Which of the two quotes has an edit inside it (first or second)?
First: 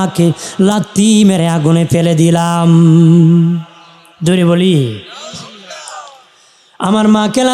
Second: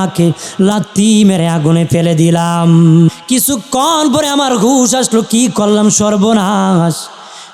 second